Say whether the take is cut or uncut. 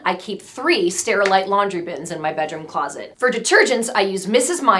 cut